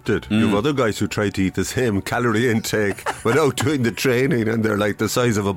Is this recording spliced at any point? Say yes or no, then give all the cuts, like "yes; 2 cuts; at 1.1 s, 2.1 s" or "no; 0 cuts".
no; 0 cuts